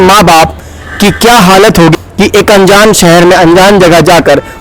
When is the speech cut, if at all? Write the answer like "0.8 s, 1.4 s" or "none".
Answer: 1.9 s